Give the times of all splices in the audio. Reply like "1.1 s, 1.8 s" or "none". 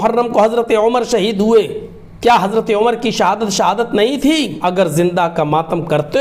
4.5 s